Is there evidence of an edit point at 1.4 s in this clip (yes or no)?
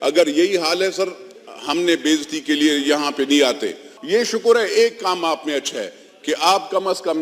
no